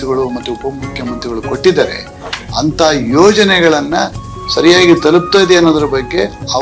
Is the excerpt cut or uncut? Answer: uncut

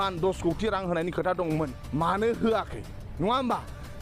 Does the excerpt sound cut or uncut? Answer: cut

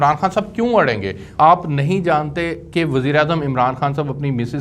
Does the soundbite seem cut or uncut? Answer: cut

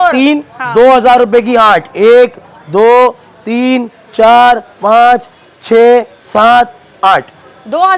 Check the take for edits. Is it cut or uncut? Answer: uncut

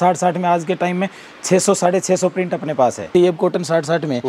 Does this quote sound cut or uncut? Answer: uncut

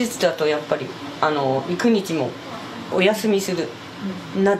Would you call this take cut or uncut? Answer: uncut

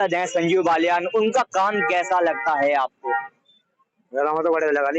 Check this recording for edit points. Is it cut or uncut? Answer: uncut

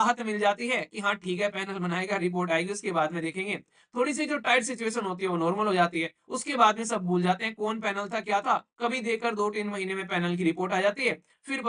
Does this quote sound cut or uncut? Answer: uncut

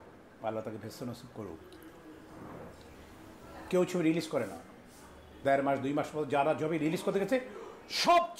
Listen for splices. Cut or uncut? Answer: uncut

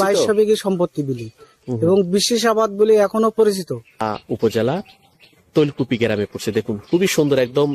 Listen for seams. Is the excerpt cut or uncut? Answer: cut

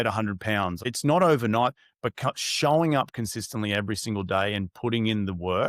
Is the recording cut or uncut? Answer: cut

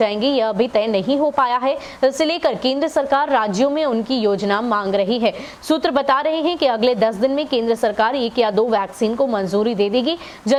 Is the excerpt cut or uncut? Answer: uncut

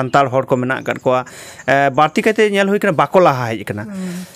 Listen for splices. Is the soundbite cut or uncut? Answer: uncut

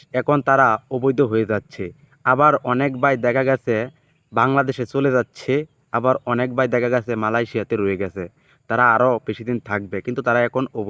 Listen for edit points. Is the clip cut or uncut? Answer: uncut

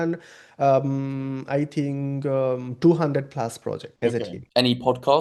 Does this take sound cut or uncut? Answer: uncut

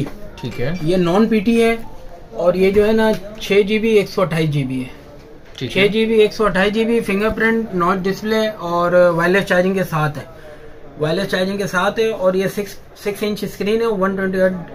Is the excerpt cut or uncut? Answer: uncut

